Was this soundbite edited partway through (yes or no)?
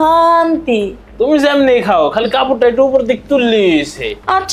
yes